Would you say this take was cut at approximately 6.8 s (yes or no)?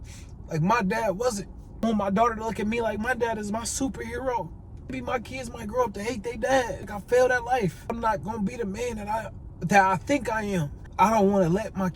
yes